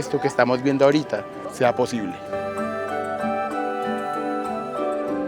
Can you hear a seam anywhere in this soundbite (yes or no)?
no